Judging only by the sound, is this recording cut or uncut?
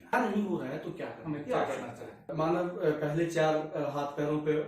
cut